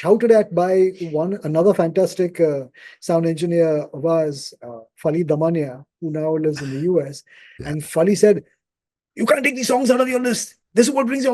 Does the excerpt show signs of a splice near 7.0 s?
no; 0 cuts

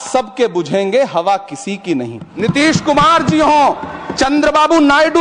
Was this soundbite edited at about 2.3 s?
yes; 1 cut; at 2.3 s

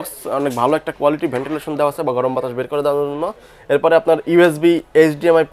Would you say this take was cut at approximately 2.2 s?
no; 0 cuts

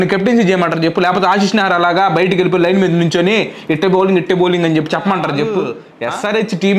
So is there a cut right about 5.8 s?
yes; 1 cut; at 5.8 s

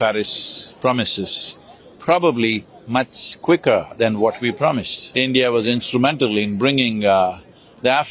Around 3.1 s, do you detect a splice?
no; 1 cut; at 5.1 s

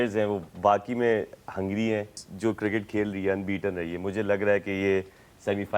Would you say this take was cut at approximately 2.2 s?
yes; 1 cut; at 2.2 s

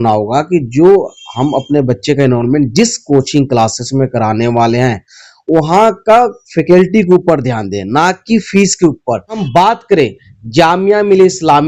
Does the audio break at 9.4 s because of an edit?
yes; 1 cut; at 9.4 s

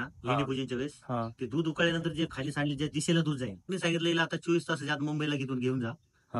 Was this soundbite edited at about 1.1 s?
no; 1 cut; at 3.6 s

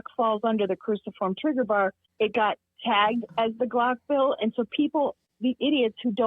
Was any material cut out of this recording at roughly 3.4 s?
no; 2 cuts; at 2.0 s, 5.3 s

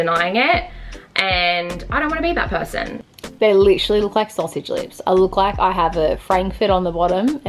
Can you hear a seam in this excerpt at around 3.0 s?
yes; 1 cut; at 3.0 s

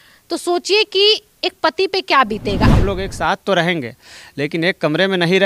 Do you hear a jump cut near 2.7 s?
yes; 1 cut; at 2.7 s

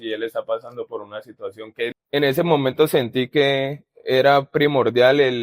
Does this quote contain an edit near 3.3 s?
no; 1 cut; at 1.9 s

